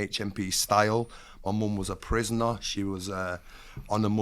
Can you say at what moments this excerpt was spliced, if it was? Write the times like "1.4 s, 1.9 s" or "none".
none